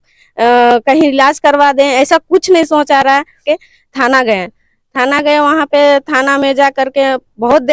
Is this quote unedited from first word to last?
no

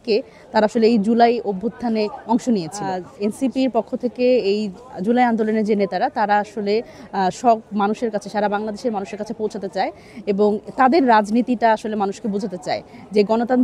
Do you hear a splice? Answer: yes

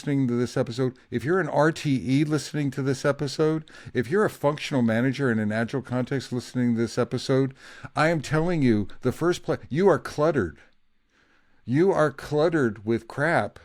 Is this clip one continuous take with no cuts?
yes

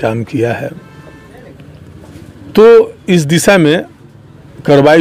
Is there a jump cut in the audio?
no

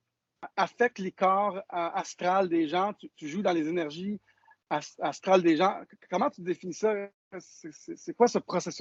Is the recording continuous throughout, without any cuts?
yes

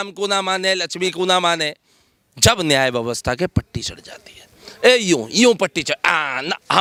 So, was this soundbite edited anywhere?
no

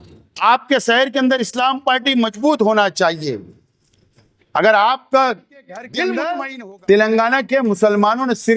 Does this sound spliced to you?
yes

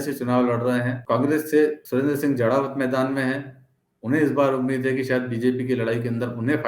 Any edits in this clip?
yes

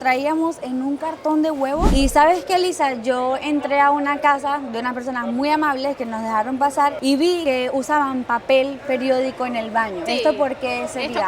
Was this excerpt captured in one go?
no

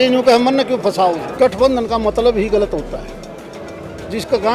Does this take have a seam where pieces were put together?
yes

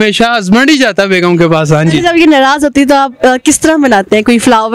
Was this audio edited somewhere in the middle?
no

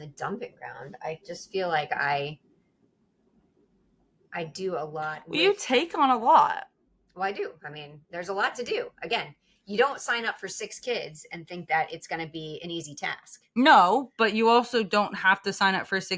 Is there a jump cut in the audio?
no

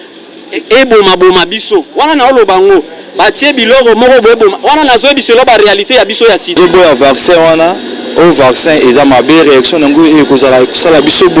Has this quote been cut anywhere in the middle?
yes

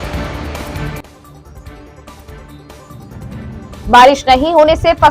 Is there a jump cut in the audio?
yes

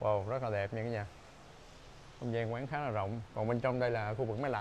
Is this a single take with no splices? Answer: yes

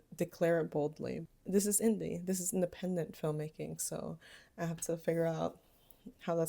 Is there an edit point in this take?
yes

